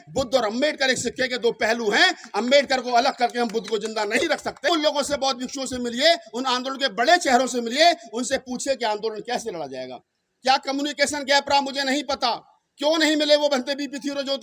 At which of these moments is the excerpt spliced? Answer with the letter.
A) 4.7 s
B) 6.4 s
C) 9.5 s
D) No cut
A